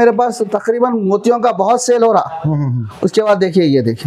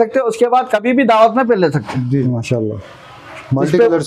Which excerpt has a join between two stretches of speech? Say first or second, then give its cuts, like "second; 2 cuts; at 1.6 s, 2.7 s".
second; 1 cut; at 2.1 s